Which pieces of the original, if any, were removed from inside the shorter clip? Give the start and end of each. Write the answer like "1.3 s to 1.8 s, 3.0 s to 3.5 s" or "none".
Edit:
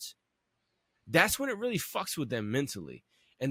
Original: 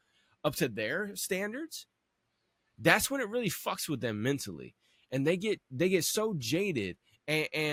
none

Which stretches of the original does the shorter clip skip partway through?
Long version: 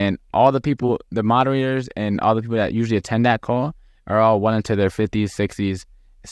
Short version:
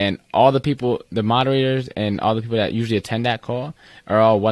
none

